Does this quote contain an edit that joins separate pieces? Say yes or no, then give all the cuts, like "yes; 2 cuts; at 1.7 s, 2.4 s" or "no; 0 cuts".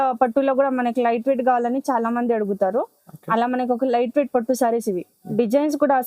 yes; 1 cut; at 5.1 s